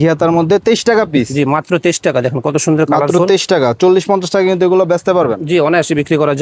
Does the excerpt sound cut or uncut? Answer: uncut